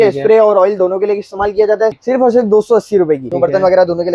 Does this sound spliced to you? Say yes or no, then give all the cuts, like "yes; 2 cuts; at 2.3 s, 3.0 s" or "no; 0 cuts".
yes; 2 cuts; at 1.9 s, 3.3 s